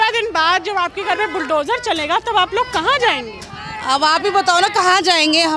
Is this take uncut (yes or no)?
yes